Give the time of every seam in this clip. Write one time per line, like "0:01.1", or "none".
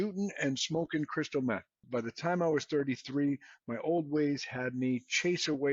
0:01.8